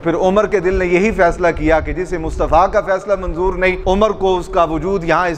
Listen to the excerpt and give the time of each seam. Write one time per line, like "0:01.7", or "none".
0:03.8